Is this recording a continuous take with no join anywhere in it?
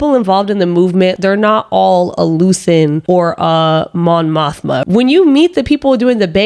no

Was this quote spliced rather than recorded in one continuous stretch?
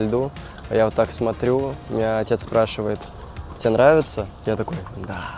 no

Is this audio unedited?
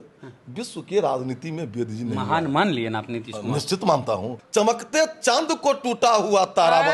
no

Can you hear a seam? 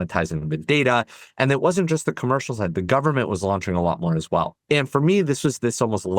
yes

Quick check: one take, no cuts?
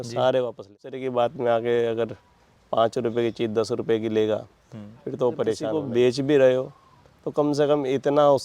no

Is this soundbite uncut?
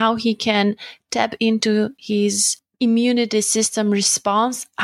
yes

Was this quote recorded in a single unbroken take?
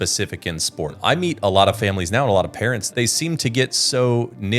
no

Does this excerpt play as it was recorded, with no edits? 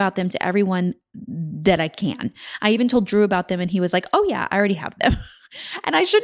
yes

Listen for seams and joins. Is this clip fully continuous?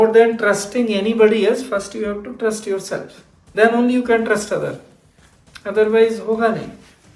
yes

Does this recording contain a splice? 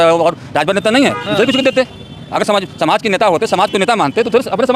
no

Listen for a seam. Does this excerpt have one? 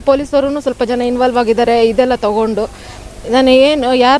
no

